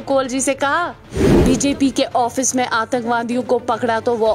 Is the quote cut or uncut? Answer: cut